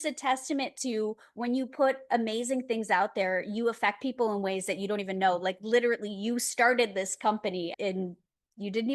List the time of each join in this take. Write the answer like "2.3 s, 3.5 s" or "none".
7.7 s

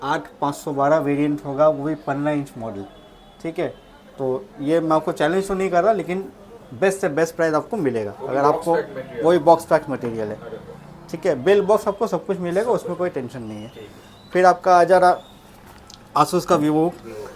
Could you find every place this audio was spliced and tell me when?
none

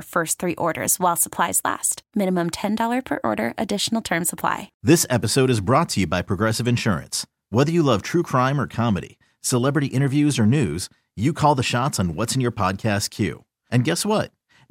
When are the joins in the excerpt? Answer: 4.7 s

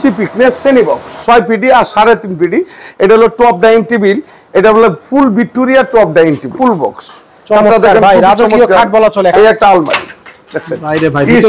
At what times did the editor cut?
1.2 s, 6.5 s, 9.3 s

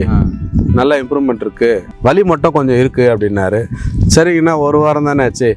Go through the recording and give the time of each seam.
1.9 s

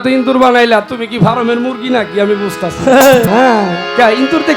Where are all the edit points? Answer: 3.3 s

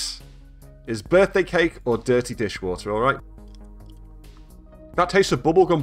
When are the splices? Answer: 3.2 s, 4.5 s

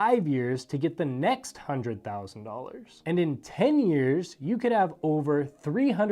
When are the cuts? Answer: 2.9 s

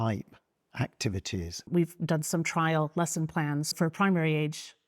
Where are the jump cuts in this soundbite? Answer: 1.6 s, 3.7 s

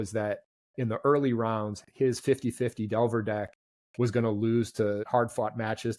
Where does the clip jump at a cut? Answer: 5.1 s

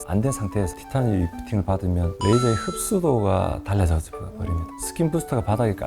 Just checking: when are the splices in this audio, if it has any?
4.7 s

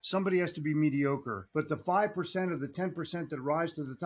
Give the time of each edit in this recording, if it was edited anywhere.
1.4 s

